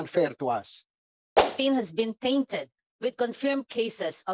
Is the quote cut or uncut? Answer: cut